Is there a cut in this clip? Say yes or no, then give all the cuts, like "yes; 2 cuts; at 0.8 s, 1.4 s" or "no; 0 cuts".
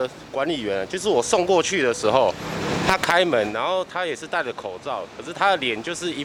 no; 0 cuts